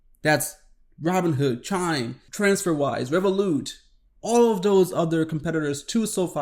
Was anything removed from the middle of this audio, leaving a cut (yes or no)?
yes